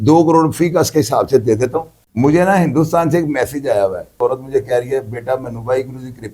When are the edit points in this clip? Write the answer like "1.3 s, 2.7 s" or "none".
2.0 s